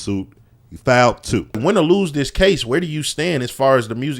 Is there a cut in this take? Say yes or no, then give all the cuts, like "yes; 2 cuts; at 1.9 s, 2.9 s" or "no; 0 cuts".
yes; 1 cut; at 1.6 s